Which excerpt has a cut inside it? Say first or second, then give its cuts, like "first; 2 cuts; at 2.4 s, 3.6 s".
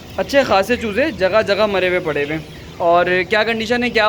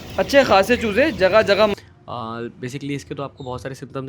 second; 1 cut; at 1.7 s